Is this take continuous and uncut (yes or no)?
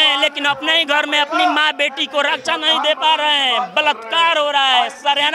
yes